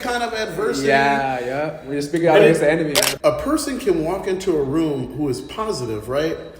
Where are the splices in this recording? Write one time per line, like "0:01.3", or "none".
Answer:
0:03.1